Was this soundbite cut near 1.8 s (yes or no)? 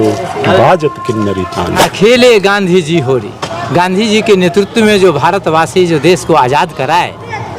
yes